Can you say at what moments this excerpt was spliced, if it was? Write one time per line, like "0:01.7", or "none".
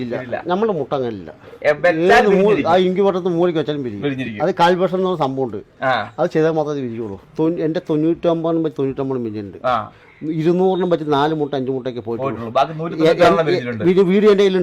0:07.2